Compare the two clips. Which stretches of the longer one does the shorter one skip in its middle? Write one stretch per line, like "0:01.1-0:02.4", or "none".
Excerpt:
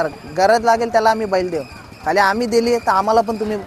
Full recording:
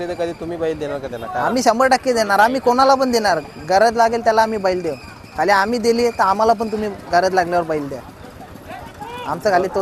none